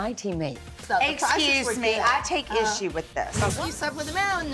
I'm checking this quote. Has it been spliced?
yes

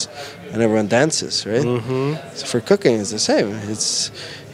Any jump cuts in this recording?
no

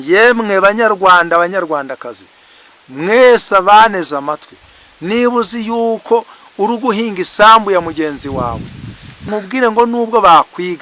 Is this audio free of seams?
no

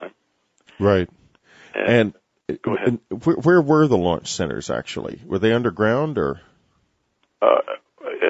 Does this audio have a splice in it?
yes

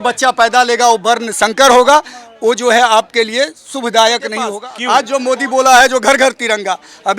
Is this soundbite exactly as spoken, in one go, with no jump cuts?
no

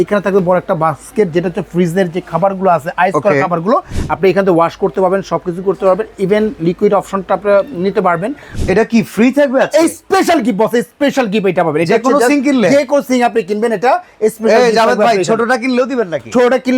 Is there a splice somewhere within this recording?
yes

